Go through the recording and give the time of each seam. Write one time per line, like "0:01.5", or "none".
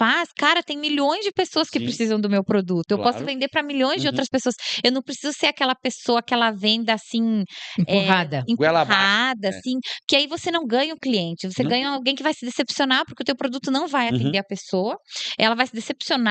none